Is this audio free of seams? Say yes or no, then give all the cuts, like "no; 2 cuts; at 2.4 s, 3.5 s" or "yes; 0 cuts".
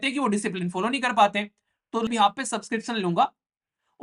no; 1 cut; at 2.1 s